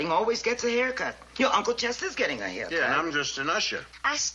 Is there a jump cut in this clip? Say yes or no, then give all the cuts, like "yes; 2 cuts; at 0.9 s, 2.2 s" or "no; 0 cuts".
yes; 1 cut; at 2.5 s